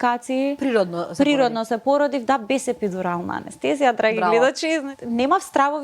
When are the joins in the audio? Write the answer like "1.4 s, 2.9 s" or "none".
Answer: 4.9 s